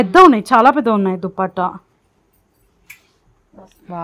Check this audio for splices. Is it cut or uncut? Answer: uncut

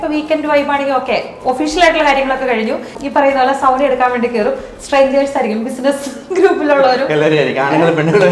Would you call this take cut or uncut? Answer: cut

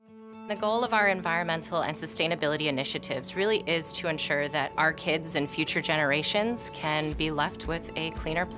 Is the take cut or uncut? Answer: uncut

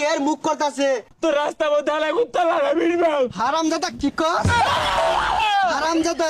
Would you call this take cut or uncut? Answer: cut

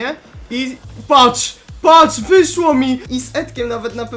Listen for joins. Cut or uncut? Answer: cut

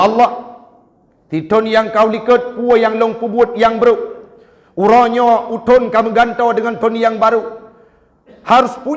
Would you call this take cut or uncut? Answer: uncut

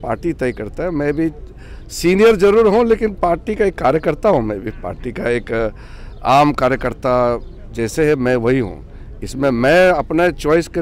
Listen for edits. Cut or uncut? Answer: uncut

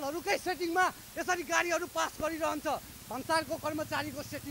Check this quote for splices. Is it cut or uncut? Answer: uncut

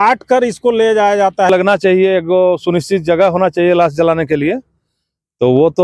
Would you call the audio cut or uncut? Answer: cut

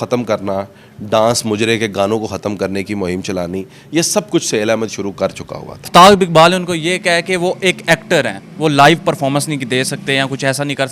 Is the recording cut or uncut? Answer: cut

